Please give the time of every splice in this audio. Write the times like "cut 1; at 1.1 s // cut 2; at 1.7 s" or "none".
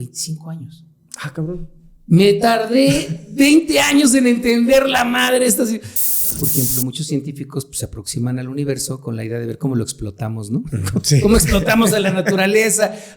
cut 1; at 6.3 s